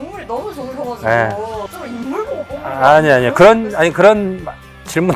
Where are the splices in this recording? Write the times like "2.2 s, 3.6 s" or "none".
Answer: none